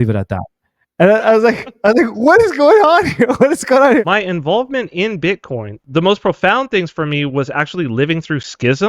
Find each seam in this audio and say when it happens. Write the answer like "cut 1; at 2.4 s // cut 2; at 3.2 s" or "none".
cut 1; at 4.1 s // cut 2; at 5.8 s